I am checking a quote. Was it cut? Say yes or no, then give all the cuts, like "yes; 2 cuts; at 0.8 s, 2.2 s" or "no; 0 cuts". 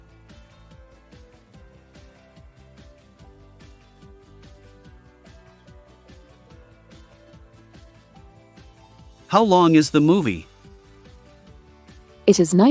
no; 0 cuts